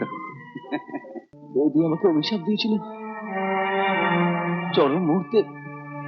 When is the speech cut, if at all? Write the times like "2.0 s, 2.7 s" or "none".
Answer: 1.4 s